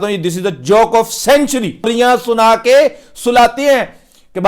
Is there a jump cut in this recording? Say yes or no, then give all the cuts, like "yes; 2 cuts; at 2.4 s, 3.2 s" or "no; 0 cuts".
yes; 1 cut; at 1.9 s